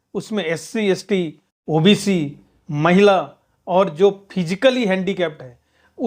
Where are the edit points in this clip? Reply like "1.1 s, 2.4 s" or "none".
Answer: none